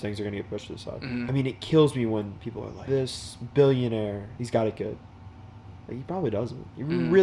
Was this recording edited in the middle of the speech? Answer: yes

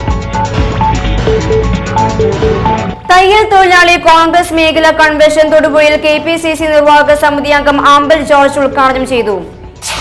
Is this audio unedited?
no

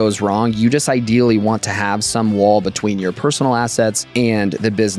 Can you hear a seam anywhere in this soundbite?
yes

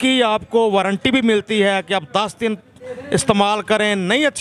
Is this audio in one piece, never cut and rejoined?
yes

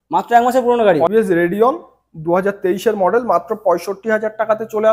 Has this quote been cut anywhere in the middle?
yes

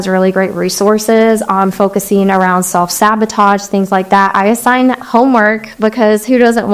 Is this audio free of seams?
yes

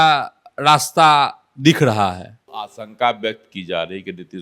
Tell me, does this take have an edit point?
yes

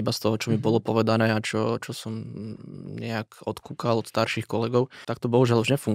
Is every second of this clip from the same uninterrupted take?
no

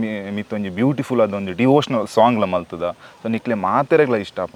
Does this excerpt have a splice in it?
no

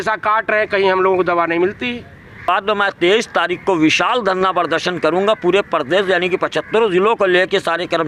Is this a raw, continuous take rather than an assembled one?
no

